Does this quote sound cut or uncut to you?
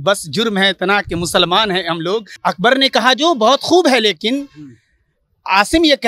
cut